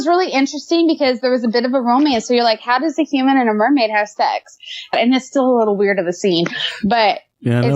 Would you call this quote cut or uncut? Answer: cut